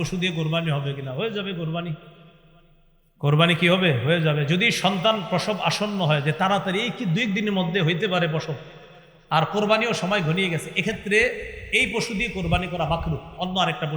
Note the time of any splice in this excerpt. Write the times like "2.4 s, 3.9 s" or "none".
none